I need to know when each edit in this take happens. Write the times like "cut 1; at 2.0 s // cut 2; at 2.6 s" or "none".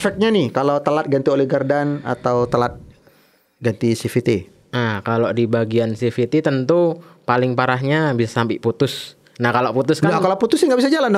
none